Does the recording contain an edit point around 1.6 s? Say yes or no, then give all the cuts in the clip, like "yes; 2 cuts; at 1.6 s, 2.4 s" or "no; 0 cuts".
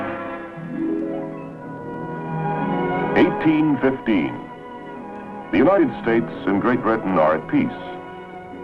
no; 0 cuts